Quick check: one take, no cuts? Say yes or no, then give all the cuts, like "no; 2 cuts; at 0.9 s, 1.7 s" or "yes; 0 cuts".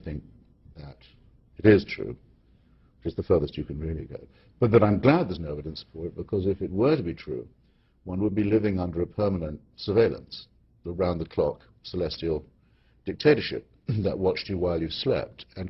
yes; 0 cuts